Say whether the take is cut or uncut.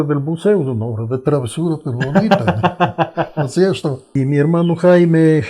cut